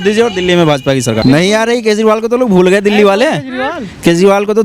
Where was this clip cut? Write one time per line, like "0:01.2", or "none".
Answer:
0:01.2